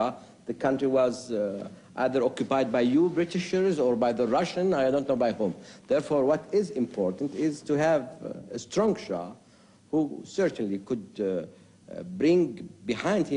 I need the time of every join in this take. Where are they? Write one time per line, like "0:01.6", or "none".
0:09.1

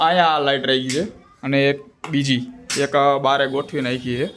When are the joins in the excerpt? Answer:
none

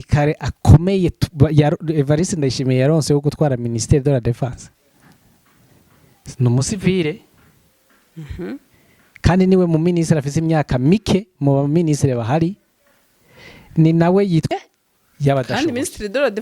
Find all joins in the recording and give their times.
0:14.5

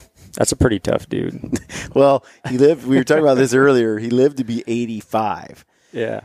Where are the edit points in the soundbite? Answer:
none

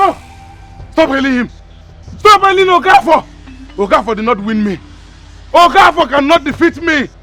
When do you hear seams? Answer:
none

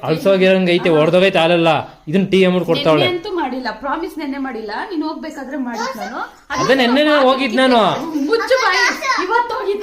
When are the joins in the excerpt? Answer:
none

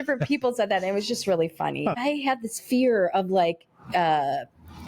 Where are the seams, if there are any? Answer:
0:02.0

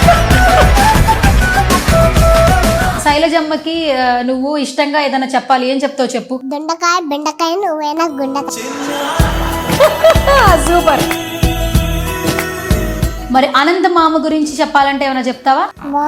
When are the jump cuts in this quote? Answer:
0:03.0

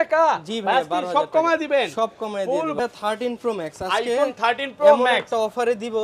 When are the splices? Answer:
0:02.8

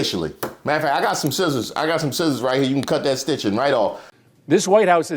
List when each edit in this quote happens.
0:04.1

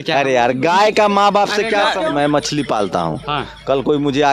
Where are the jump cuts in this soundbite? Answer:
0:02.1

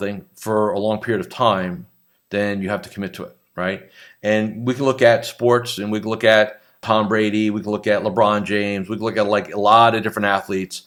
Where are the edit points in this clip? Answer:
none

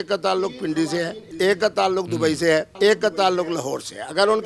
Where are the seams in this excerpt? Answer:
0:01.2
0:02.7

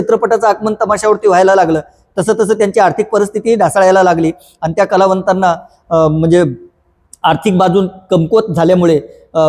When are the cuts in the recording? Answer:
none

